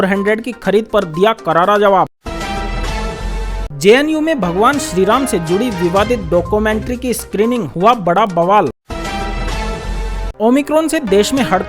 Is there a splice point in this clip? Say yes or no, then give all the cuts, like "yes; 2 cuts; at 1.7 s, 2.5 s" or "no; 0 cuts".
yes; 3 cuts; at 2.1 s, 3.4 s, 8.8 s